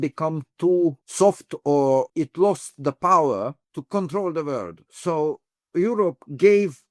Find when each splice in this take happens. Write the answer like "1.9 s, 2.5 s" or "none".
1.0 s, 2.1 s, 3.7 s, 5.7 s